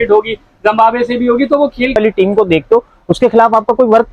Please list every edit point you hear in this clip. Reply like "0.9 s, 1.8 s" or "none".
2.0 s